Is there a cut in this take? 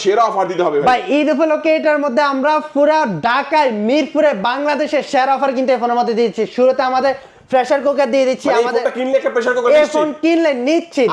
no; 0 cuts

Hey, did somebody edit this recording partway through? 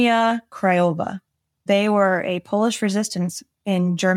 yes; 1 cut; at 1.6 s

